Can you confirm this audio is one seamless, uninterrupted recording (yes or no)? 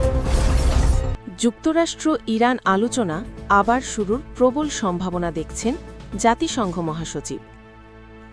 yes